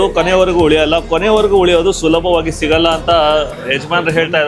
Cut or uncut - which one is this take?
uncut